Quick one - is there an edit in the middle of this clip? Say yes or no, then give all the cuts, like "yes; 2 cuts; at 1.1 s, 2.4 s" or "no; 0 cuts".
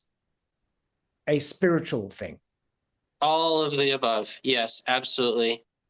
no; 0 cuts